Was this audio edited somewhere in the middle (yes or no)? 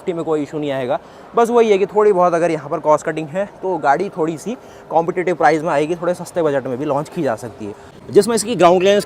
yes